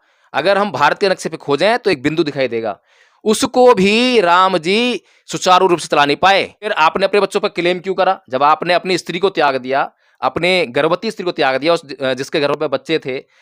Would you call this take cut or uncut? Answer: uncut